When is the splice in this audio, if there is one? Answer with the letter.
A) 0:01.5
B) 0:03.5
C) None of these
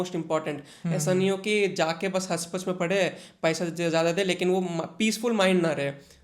C